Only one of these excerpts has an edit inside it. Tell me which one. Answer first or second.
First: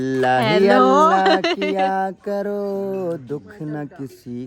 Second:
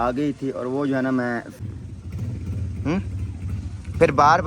second